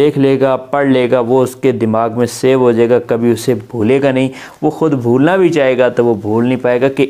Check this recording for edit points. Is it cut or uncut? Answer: uncut